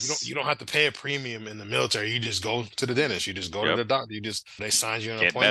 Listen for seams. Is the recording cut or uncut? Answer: uncut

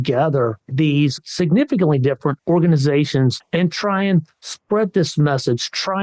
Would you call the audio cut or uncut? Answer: cut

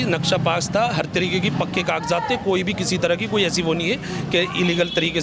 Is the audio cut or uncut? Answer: uncut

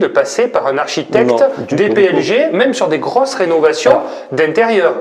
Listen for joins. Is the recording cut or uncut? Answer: uncut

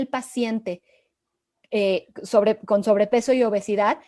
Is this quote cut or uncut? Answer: uncut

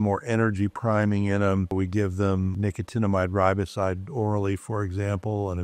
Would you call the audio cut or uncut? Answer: cut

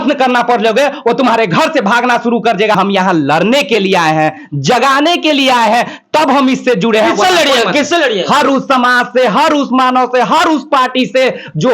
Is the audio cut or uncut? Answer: cut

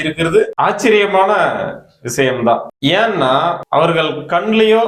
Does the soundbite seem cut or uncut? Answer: cut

